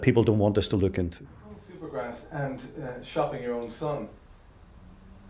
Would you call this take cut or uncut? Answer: cut